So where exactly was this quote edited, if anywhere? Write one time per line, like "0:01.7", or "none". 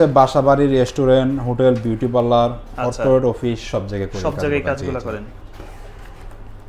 none